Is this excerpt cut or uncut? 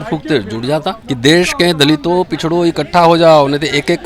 cut